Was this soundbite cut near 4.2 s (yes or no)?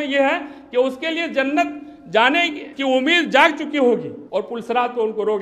yes